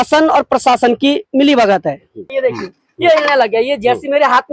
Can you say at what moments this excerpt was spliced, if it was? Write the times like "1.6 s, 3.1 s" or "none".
2.3 s